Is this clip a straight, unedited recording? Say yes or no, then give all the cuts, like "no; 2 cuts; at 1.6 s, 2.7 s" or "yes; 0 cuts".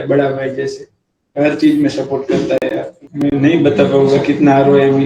no; 1 cut; at 3.0 s